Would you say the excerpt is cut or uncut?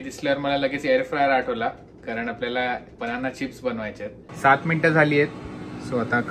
cut